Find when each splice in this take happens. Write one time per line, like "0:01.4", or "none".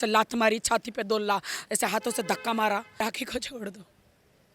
0:02.9